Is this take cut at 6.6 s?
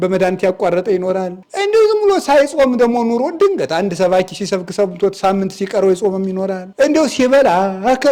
yes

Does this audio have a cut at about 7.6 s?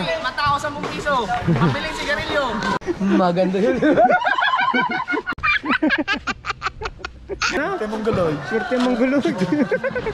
yes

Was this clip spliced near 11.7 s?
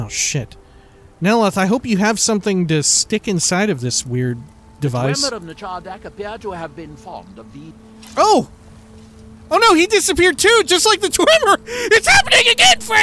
yes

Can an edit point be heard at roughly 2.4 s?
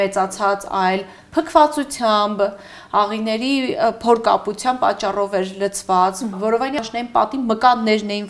no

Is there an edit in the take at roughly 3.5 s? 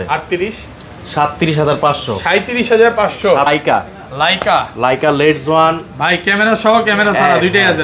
yes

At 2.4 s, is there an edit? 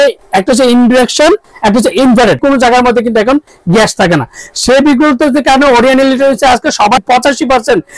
yes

